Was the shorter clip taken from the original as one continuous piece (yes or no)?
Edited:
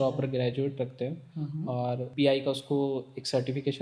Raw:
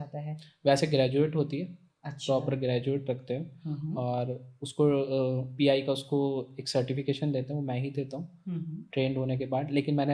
no